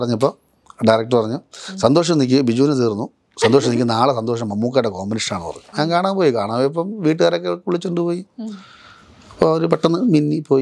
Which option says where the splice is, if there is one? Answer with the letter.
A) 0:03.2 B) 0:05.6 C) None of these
B